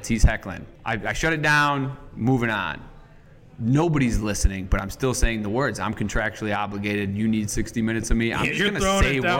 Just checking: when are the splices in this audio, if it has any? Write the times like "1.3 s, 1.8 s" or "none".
none

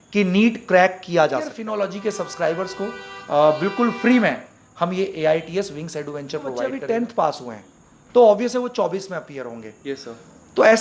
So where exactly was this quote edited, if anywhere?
1.6 s, 6.8 s

